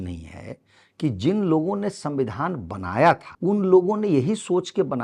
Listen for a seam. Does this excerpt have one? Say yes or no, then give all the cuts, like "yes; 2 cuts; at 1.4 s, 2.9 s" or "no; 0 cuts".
yes; 1 cut; at 3.3 s